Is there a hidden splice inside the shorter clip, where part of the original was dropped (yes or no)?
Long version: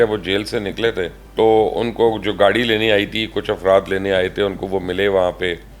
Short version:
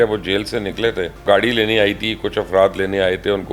yes